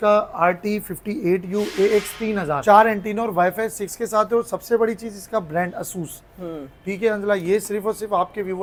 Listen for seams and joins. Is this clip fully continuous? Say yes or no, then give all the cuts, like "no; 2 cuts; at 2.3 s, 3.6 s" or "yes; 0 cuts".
yes; 0 cuts